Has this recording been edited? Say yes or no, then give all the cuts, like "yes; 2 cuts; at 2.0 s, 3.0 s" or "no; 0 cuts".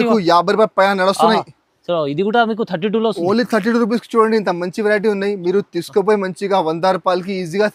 no; 0 cuts